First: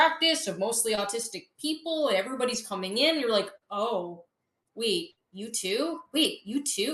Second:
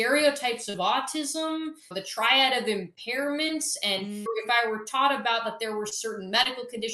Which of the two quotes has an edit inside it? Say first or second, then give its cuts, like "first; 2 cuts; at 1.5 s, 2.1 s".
second; 2 cuts; at 1.8 s, 4.2 s